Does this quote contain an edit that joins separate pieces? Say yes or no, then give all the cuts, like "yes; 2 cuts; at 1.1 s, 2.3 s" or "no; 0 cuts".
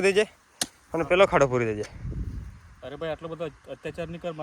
no; 0 cuts